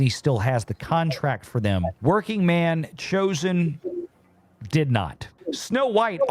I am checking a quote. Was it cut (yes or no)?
yes